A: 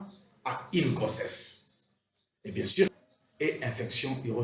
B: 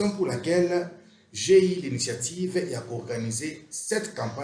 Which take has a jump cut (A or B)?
A